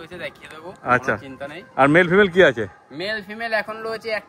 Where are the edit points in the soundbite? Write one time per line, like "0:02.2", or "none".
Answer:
none